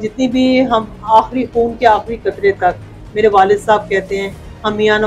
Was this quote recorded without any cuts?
yes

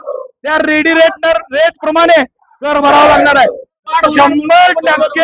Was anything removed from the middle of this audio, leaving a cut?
yes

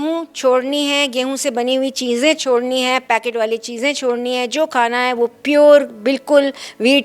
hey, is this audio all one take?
yes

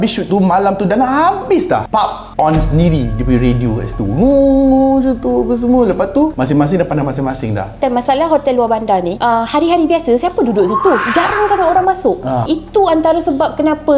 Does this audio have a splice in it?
yes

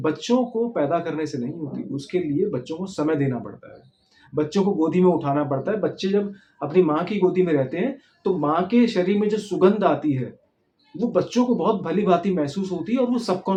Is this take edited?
no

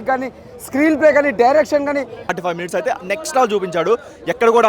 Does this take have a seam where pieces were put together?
yes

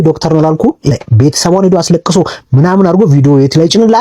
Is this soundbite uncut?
no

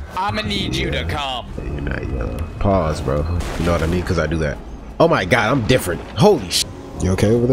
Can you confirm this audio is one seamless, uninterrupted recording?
no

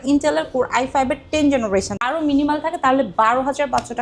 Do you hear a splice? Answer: yes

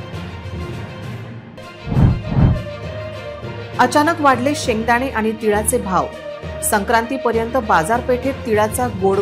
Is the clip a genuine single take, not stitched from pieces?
yes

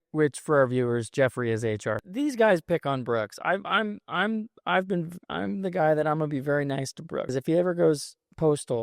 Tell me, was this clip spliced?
yes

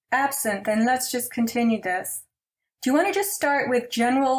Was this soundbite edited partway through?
no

